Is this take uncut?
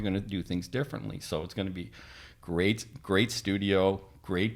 yes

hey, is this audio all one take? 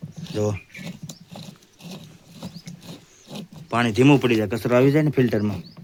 yes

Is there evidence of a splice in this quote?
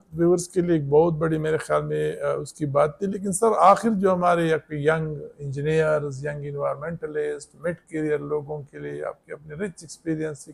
no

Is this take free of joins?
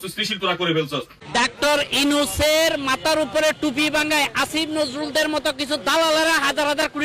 no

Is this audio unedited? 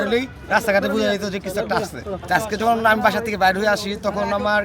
no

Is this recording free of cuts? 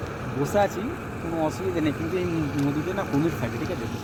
yes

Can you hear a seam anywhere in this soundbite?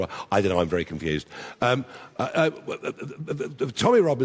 no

